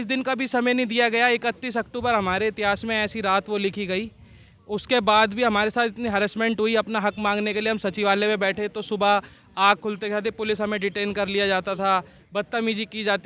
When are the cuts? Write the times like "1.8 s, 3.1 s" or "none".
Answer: none